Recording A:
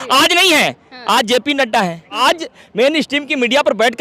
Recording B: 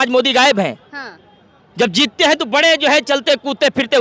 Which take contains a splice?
A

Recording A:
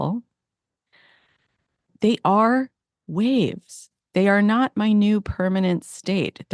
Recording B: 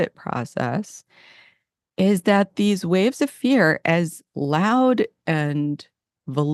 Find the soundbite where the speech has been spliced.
A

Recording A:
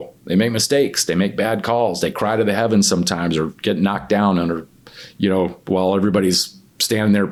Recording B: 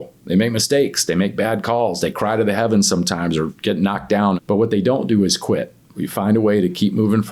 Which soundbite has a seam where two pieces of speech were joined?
B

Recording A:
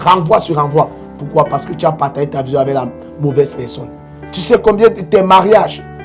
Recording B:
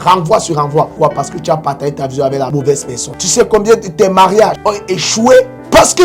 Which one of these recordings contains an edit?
B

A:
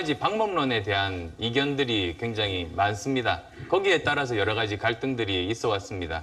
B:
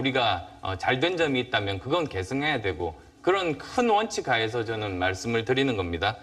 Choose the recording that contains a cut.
B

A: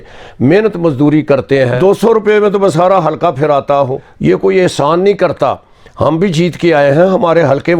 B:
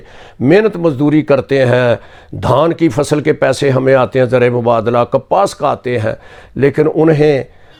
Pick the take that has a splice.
A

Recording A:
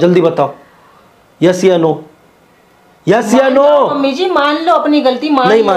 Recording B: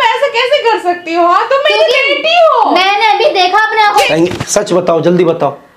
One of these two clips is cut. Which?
B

